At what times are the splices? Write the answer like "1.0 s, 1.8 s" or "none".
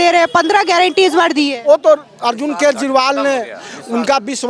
none